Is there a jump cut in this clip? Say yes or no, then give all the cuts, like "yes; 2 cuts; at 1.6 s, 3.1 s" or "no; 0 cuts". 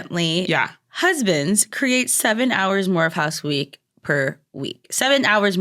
no; 0 cuts